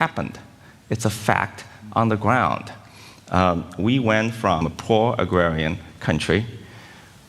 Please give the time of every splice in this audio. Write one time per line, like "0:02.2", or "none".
0:04.6

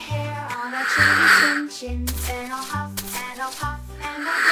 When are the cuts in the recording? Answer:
none

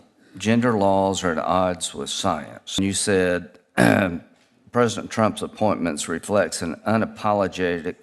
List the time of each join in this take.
0:02.8

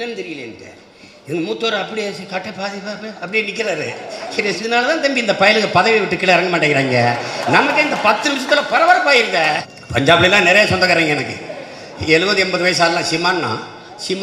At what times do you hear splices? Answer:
0:04.6
0:09.6

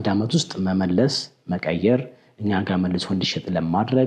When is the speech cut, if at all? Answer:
none

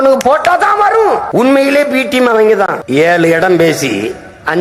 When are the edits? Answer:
0:01.3
0:02.8

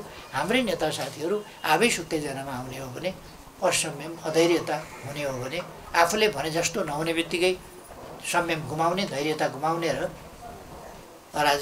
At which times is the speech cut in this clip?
none

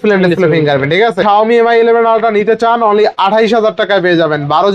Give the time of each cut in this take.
0:01.2

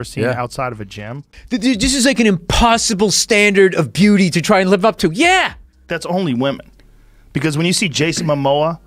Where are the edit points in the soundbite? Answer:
0:01.3
0:05.9

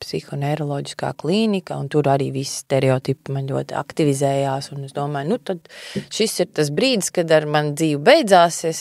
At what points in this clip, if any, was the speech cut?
none

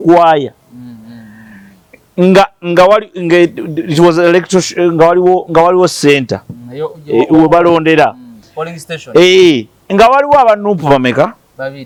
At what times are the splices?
none

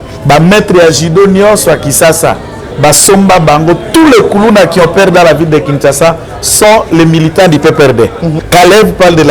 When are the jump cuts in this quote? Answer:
0:08.3

